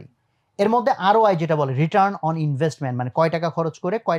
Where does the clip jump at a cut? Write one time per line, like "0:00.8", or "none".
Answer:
none